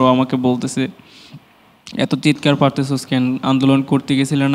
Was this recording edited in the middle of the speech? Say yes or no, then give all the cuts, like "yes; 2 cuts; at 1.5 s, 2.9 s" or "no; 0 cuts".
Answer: no; 0 cuts